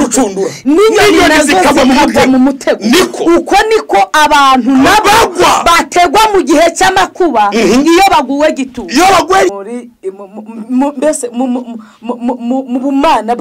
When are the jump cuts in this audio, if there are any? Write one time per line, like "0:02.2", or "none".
0:09.5